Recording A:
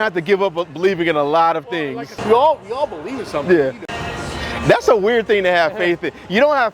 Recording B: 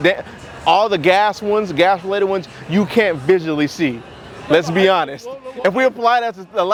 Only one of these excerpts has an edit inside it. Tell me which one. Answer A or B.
A